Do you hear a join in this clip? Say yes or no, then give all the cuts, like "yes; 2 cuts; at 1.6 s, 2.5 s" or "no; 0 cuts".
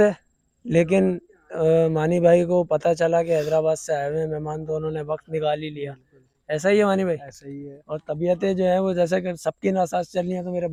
no; 0 cuts